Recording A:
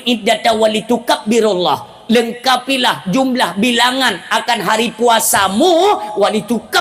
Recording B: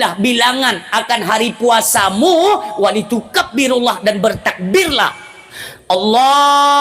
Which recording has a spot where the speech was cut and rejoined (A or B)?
B